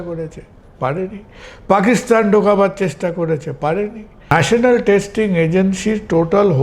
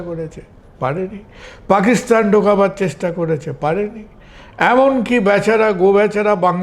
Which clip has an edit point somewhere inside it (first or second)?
first